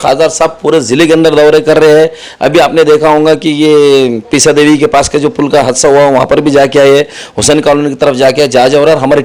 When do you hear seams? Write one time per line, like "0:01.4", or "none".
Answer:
none